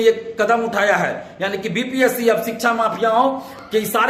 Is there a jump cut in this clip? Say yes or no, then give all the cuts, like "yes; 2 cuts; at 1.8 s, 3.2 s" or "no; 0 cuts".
no; 0 cuts